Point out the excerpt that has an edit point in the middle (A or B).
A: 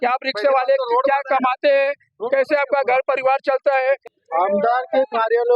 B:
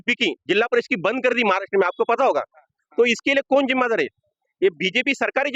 A